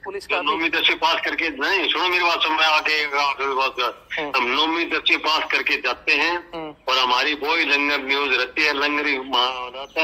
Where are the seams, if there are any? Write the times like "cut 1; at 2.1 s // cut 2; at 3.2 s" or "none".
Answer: none